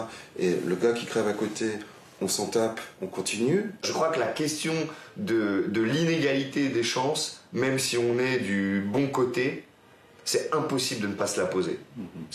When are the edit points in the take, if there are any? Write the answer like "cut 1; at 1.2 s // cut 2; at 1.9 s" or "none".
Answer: cut 1; at 3.9 s